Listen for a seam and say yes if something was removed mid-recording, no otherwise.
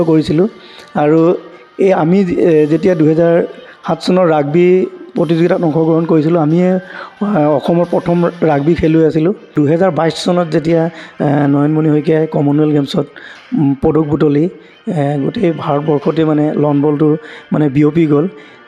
yes